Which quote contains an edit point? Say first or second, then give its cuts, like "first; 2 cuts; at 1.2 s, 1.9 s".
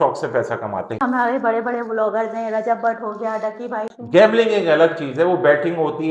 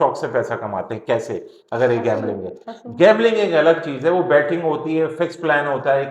first; 2 cuts; at 1.0 s, 3.9 s